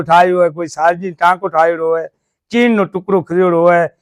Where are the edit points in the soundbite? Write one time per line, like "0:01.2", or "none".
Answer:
none